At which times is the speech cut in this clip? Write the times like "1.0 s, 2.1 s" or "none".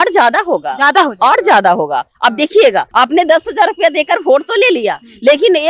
2.9 s